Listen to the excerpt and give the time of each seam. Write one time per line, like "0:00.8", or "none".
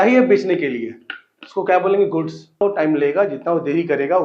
0:02.6